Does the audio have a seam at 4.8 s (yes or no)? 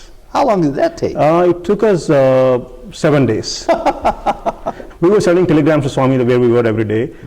yes